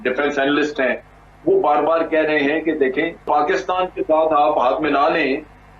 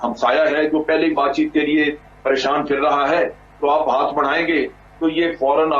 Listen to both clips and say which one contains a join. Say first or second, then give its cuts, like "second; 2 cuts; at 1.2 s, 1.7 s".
first; 1 cut; at 3.3 s